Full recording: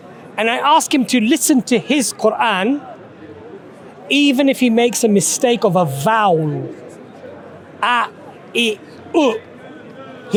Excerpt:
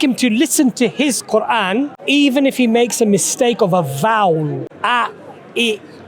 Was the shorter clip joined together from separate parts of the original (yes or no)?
yes